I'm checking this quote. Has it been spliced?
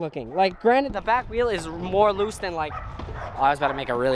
no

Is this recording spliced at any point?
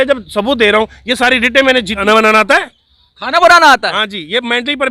yes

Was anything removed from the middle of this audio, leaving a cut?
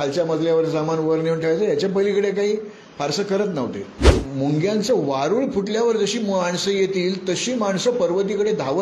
yes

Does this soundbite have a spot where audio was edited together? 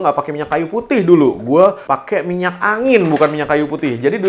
yes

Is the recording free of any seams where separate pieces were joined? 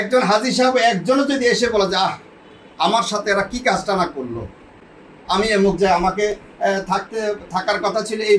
yes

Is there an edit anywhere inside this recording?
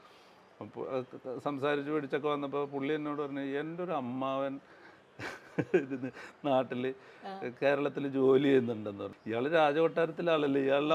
no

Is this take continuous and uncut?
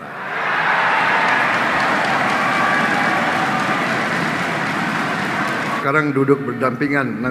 no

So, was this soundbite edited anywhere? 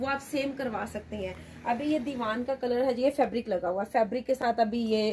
no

